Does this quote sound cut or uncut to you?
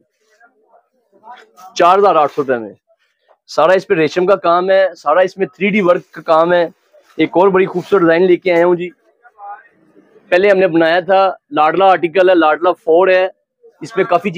uncut